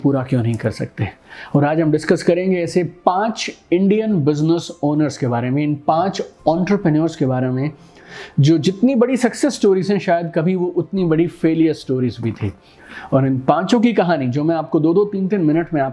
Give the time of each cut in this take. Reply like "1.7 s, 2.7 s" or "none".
none